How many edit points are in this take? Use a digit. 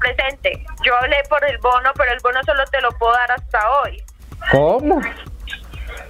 0